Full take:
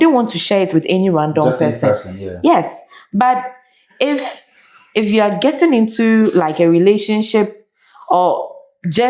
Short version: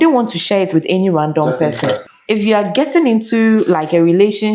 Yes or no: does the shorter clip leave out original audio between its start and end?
yes